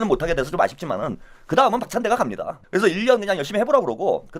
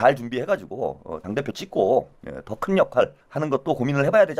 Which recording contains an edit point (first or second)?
second